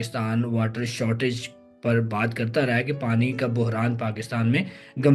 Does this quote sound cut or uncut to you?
uncut